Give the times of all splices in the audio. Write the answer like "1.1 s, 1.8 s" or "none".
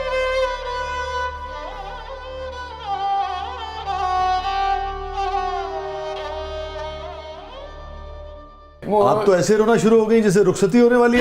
none